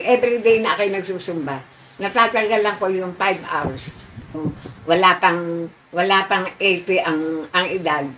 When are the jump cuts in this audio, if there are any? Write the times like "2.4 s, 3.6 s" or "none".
4.3 s